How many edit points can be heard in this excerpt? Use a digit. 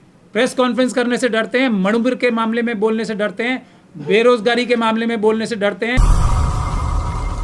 1